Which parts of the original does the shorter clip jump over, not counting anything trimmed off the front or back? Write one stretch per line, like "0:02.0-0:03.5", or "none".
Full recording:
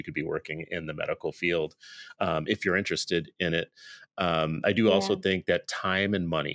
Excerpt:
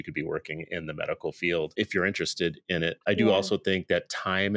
0:01.7-0:02.4
0:03.7-0:04.6